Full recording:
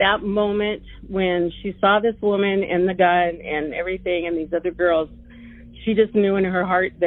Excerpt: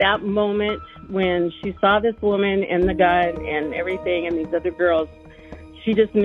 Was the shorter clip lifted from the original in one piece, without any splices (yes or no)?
yes